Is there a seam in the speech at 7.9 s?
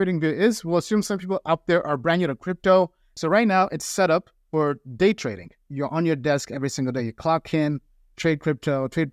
no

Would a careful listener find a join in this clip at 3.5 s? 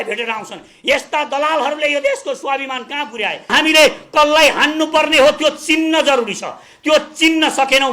yes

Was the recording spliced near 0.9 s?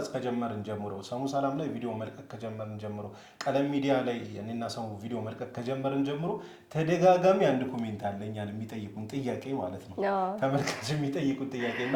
no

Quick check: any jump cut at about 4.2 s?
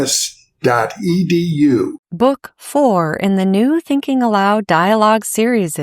no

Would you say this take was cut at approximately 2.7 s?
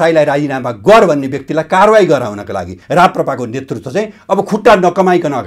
yes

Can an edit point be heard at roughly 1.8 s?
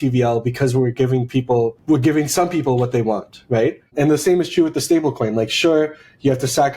yes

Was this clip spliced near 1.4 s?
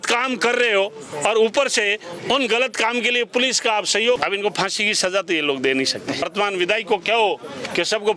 no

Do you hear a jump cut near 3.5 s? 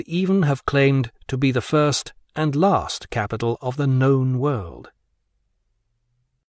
no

